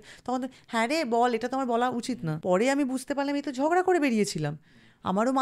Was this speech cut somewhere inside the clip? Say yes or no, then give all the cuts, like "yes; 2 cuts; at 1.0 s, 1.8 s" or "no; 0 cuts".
yes; 1 cut; at 2.3 s